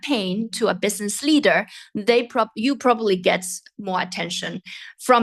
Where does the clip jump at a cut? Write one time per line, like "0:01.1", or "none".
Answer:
none